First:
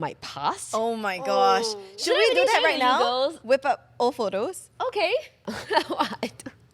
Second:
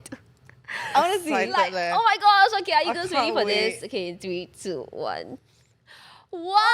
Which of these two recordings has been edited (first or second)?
first